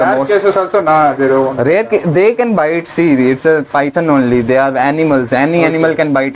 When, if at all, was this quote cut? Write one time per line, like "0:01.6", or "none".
none

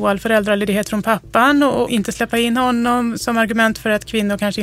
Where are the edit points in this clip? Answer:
0:01.9

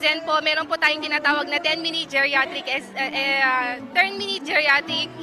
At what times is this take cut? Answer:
0:03.7

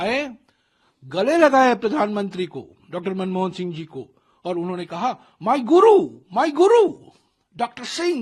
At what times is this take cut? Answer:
none

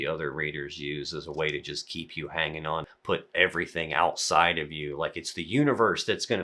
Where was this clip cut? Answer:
0:02.9

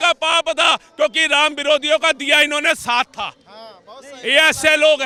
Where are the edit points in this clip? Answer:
none

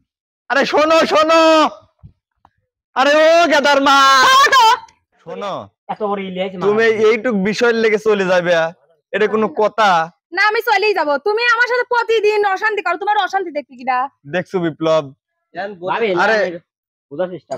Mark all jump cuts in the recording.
0:05.3

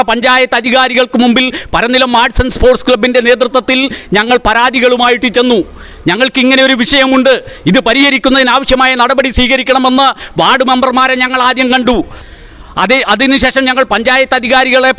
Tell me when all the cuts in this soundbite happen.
0:12.2

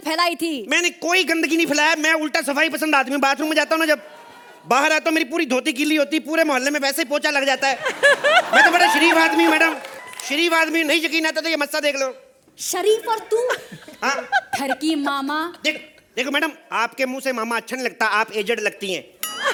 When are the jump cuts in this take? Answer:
none

